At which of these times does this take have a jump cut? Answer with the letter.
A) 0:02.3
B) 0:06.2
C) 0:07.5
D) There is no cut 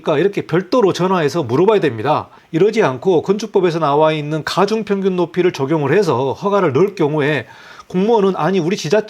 D